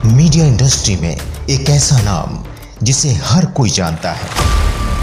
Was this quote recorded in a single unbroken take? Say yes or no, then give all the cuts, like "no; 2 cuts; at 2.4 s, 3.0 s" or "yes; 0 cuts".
yes; 0 cuts